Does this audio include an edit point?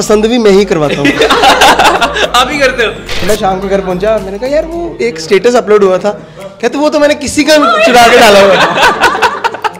yes; 1 cut; at 3.3 s

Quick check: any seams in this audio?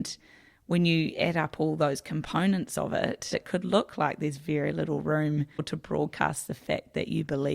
yes; 2 cuts; at 3.3 s, 5.6 s

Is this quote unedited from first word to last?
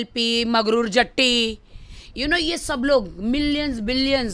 yes; 0 cuts

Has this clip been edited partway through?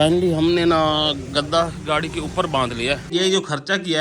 yes; 1 cut; at 3.1 s

